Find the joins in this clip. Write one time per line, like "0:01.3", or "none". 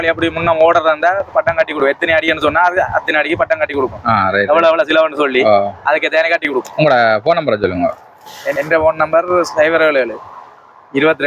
none